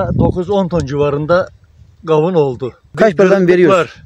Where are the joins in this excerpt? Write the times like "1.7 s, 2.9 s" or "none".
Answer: 2.9 s